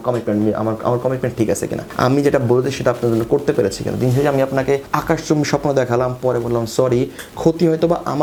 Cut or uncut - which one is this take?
uncut